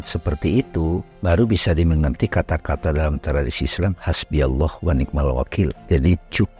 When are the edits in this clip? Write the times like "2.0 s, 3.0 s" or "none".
1.1 s, 5.8 s